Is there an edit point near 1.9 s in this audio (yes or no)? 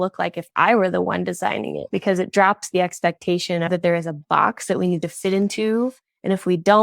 yes